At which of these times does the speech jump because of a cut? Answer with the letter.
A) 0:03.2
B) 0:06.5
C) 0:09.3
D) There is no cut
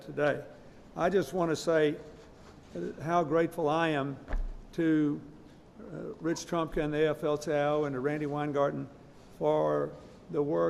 B